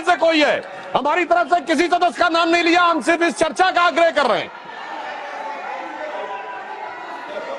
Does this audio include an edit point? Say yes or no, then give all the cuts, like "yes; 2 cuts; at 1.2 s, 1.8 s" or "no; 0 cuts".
no; 0 cuts